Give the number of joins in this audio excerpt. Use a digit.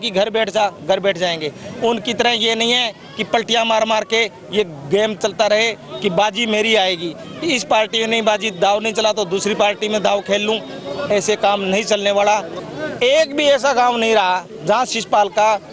1